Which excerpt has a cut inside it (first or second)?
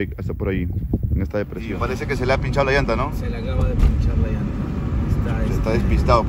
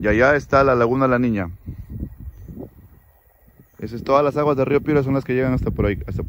first